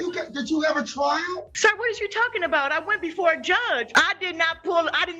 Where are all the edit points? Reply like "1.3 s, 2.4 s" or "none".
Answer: 1.5 s, 3.9 s